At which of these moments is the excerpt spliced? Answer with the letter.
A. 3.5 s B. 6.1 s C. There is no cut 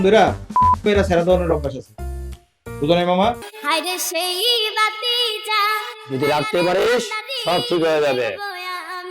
A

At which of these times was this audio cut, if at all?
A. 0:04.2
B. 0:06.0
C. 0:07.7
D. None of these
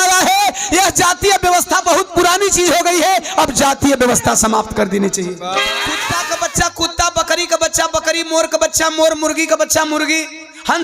B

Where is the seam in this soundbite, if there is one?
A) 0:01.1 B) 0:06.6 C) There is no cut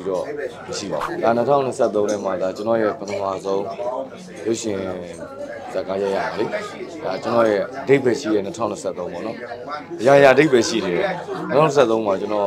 A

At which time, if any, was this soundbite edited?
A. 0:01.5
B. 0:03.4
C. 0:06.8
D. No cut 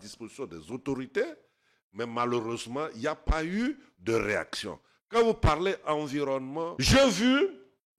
C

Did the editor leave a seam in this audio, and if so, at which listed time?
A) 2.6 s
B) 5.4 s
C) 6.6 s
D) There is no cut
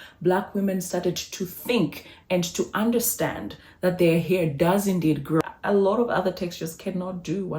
B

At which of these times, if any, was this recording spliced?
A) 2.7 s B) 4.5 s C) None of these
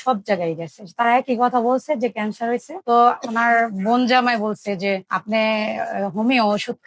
A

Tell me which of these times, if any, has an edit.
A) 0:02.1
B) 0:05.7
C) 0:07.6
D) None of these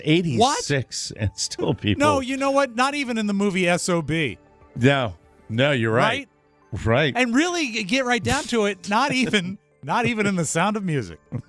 D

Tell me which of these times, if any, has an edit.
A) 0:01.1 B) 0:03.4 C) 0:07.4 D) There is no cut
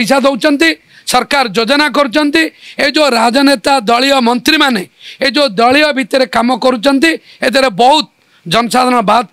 D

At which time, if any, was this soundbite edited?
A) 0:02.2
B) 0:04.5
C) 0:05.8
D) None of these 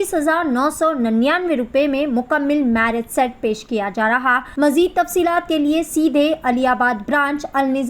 B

